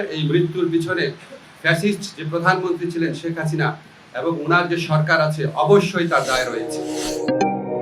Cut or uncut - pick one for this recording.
uncut